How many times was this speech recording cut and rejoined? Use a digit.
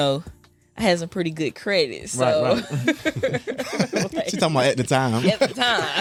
0